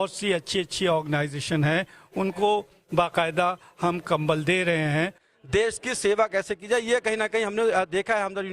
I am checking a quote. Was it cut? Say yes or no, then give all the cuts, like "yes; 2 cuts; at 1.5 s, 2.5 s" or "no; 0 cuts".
yes; 1 cut; at 5.2 s